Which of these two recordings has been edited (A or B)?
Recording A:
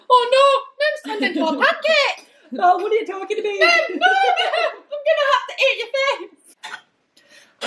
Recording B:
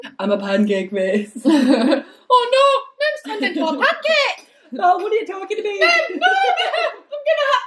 A